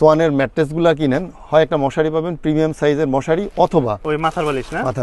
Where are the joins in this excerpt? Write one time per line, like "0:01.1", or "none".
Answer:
0:04.0